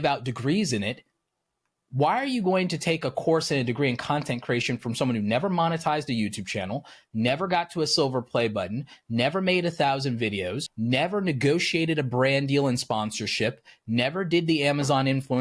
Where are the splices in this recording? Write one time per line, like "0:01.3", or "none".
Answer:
0:10.7